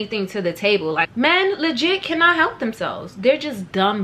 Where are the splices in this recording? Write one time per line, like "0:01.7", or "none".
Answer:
0:01.1